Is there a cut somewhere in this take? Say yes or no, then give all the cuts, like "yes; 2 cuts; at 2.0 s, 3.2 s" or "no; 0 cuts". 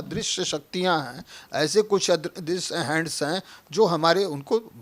no; 0 cuts